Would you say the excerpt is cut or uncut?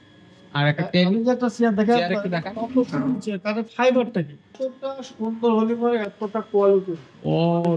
cut